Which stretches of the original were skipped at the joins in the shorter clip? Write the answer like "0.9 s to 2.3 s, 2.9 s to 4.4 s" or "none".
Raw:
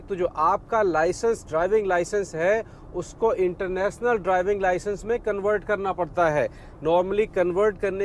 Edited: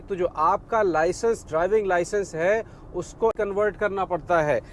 3.3 s to 5.2 s